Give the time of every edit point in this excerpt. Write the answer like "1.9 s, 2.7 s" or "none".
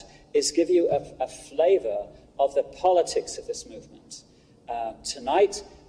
3.3 s